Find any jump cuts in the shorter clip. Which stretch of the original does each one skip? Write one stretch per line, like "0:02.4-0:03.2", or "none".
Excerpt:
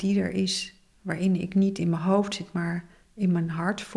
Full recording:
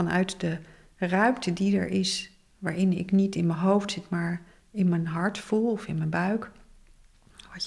none

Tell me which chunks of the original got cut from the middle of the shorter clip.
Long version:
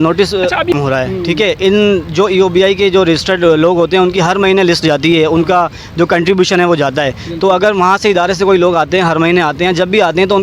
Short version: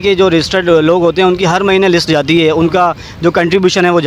none

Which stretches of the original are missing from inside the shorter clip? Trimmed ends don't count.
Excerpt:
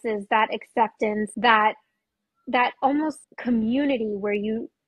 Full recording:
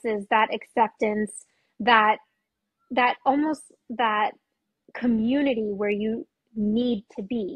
0:01.3-0:01.8
0:03.7-0:04.8

